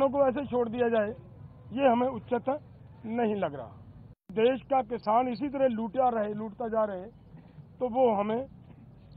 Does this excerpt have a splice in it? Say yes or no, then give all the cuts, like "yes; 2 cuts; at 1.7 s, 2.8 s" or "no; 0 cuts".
yes; 1 cut; at 4.3 s